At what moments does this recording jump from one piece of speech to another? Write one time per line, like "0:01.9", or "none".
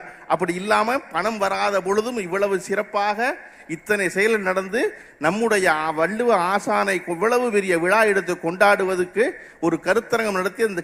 none